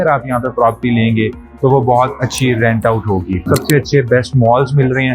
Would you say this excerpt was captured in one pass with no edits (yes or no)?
no